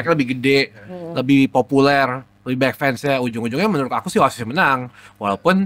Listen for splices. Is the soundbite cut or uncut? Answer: uncut